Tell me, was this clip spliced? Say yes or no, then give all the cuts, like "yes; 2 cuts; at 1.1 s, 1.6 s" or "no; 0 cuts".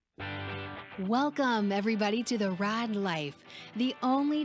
yes; 1 cut; at 0.9 s